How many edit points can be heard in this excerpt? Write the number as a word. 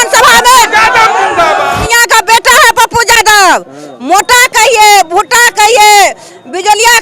one